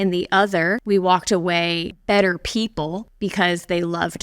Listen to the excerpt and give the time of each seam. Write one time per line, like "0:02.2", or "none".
0:00.8
0:01.9
0:03.1